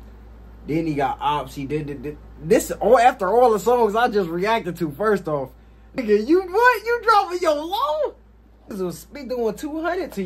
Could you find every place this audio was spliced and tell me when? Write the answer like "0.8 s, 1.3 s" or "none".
6.0 s, 8.7 s